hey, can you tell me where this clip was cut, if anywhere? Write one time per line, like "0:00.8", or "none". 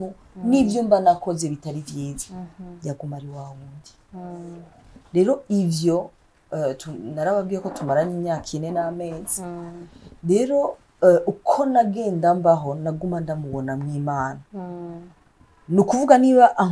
none

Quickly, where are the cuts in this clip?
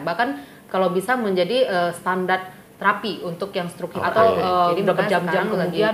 0:03.9

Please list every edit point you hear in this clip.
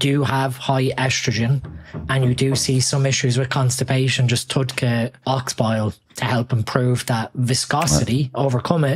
0:05.2

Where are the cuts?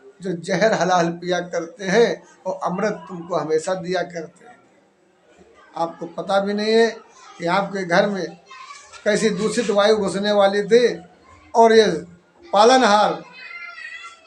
0:05.3

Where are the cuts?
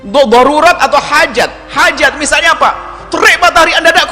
0:01.6

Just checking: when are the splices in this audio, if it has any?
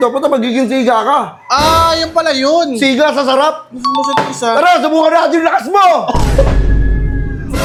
none

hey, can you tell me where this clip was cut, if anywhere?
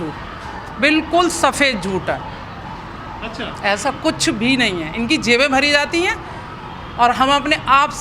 none

